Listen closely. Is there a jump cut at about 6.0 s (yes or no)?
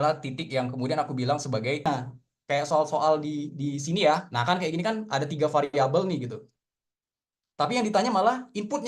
no